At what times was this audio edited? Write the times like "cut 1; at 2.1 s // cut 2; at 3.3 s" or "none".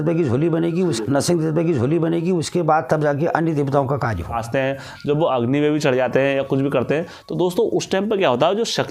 cut 1; at 4.4 s